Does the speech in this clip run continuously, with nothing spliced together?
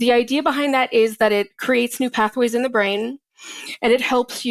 yes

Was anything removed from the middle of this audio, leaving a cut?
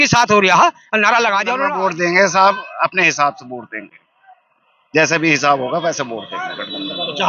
yes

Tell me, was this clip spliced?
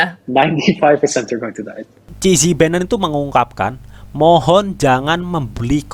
yes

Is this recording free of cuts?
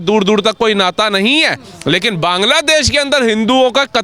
yes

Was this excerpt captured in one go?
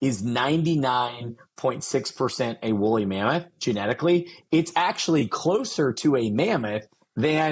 yes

